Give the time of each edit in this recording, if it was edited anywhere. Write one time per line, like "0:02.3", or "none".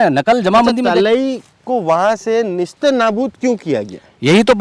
none

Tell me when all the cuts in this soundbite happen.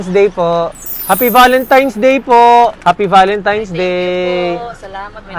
0:00.9
0:02.8

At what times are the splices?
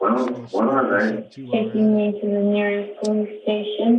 0:01.4

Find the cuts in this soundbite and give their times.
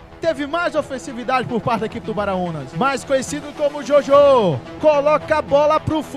0:02.6
0:04.7

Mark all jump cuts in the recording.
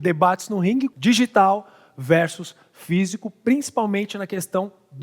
0:00.9

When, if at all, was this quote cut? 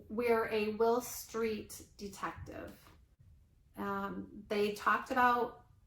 0:03.1

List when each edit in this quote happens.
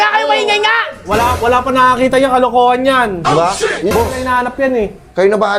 0:03.9

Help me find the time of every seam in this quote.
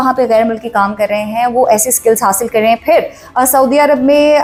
none

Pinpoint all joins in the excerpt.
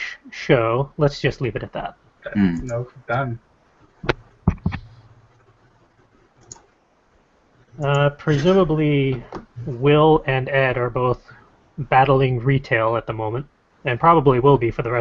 none

